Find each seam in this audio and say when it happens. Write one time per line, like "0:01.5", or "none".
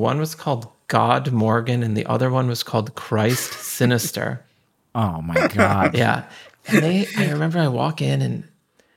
0:06.3